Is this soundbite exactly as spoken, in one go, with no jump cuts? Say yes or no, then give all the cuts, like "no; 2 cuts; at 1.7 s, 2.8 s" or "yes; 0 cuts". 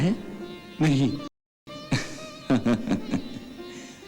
yes; 0 cuts